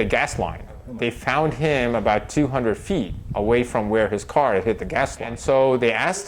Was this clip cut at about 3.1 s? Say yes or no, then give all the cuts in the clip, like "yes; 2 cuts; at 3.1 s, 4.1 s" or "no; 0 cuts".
no; 2 cuts; at 0.9 s, 5.3 s